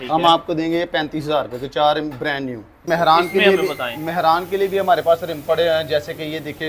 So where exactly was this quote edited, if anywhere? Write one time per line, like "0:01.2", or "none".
0:02.9